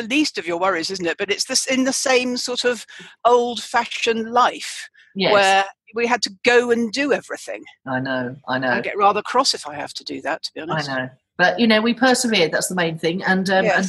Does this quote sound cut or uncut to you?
uncut